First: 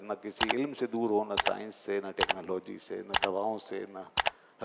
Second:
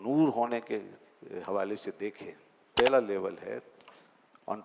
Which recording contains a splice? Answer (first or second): second